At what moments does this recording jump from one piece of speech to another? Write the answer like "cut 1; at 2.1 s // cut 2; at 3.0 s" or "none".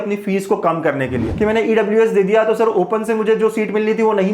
cut 1; at 1.3 s